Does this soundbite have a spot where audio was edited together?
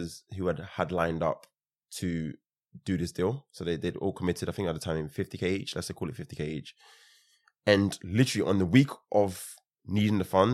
no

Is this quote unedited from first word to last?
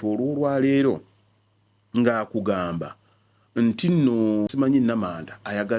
no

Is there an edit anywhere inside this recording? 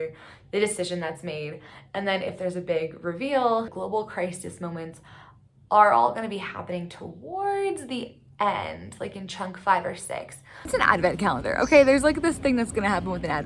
yes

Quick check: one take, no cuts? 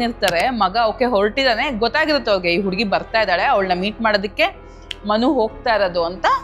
yes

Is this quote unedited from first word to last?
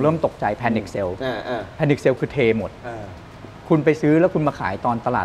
yes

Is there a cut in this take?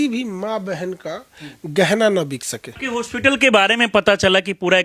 yes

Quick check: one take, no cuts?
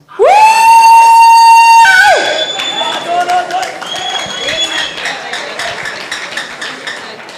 yes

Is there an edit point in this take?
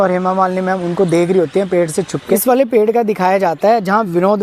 yes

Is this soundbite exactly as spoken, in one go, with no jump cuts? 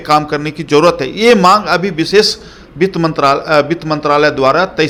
yes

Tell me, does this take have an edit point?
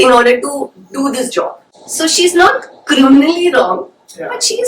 yes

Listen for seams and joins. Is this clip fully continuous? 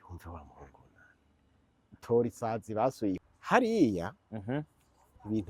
no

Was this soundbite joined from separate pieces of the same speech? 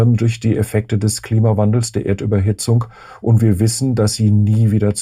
no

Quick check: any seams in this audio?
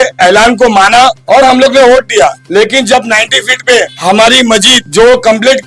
yes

